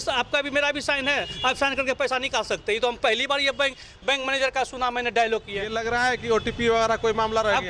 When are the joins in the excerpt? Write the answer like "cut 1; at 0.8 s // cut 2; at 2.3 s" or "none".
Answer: cut 1; at 5.8 s

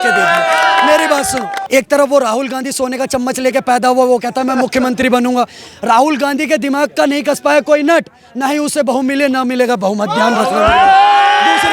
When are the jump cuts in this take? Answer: cut 1; at 1.5 s

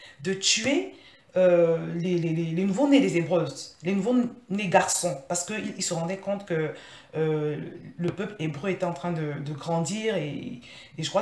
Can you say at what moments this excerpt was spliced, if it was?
none

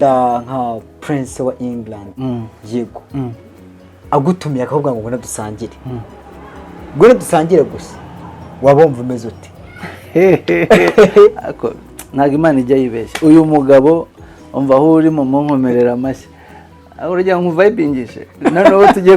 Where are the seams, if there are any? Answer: cut 1; at 2.1 s

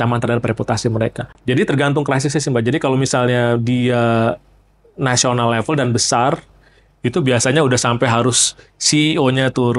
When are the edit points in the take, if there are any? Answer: cut 1; at 1.3 s

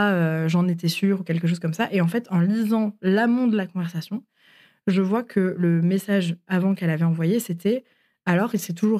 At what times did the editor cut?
none

